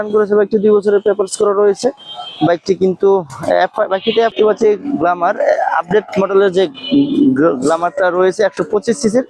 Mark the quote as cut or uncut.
cut